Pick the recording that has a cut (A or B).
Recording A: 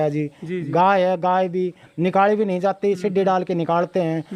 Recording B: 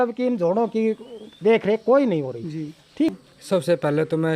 B